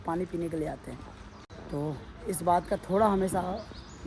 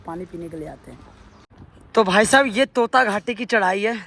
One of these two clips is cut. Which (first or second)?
second